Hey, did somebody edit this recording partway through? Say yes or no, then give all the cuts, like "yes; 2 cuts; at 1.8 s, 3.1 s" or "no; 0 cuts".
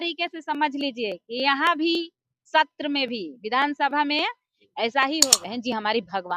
yes; 1 cut; at 5.4 s